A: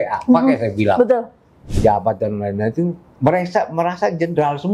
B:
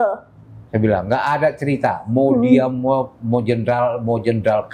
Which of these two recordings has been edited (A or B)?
A